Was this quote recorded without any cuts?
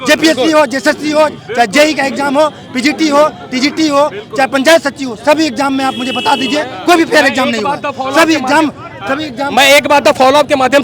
yes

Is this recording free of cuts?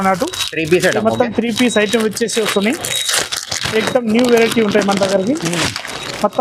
yes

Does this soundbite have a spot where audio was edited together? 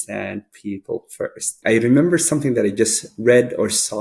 yes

